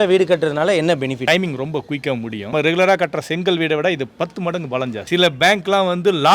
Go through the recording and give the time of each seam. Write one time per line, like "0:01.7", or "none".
0:01.3
0:02.5
0:05.1

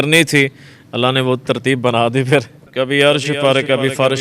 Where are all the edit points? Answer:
0:02.6

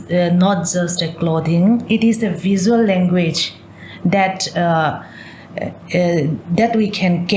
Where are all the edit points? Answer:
0:01.8

